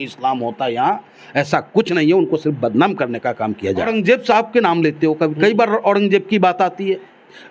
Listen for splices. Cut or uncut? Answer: cut